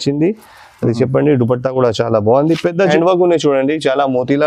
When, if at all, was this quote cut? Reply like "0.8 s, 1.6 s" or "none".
2.9 s